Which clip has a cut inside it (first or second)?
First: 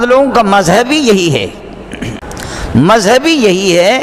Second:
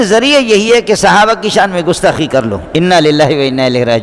first